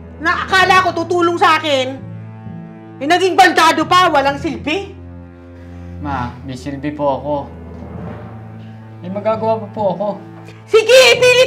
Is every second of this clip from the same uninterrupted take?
no; 2 cuts; at 7.5 s, 9.0 s

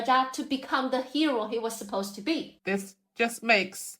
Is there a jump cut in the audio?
yes; 1 cut; at 2.5 s

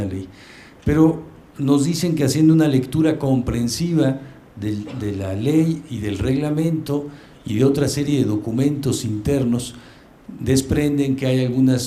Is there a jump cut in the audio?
no; 0 cuts

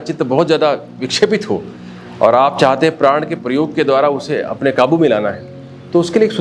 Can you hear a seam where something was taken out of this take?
no; 0 cuts

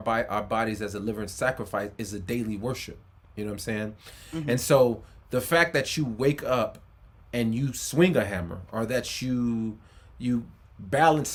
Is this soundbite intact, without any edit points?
yes; 0 cuts

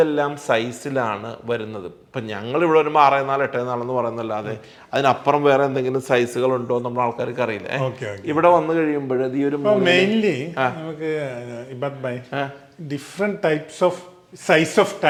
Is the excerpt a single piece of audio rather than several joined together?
yes; 0 cuts

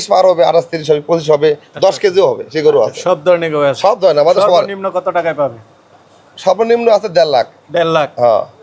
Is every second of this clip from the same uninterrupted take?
yes; 0 cuts

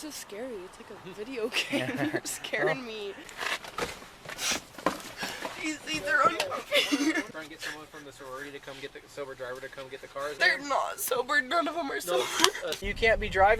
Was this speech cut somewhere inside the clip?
yes; 4 cuts; at 3.2 s, 7.3 s, 10.3 s, 12.8 s

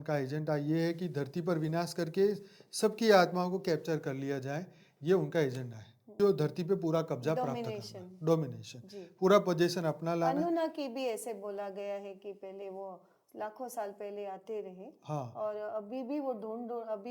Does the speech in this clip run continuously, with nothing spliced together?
no; 1 cut; at 6.1 s

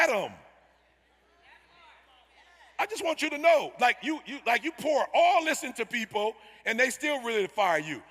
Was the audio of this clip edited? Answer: no; 0 cuts

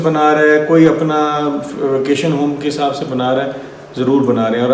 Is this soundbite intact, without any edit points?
yes; 0 cuts

